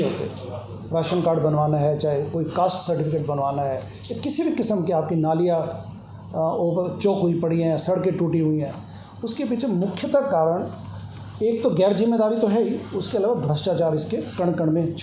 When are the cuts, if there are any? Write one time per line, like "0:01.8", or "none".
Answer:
none